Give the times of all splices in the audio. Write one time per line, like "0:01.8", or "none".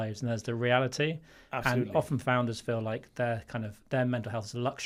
none

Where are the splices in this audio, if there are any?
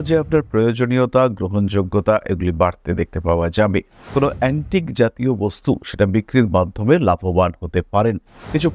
0:04.0

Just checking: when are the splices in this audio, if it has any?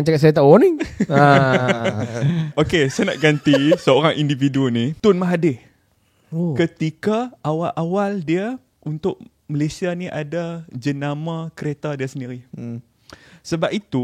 0:02.5
0:04.9
0:08.7

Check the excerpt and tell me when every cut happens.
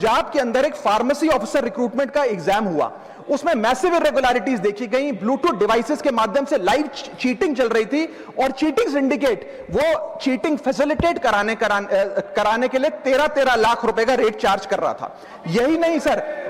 none

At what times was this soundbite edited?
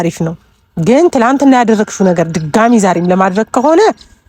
none

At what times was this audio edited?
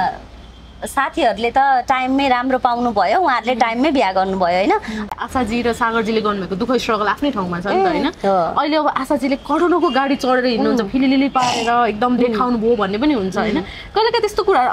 0:05.1

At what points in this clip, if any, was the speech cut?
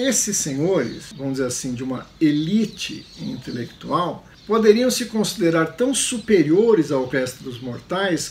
0:01.0
0:04.3

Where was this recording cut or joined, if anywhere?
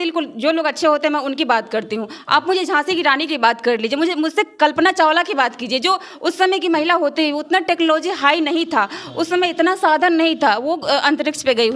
none

